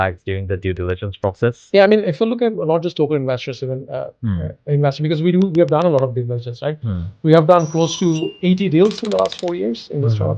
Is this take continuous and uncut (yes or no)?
yes